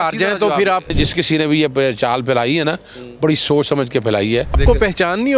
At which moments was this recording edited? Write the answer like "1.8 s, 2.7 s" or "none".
0.9 s, 4.6 s